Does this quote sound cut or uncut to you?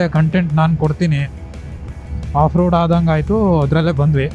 cut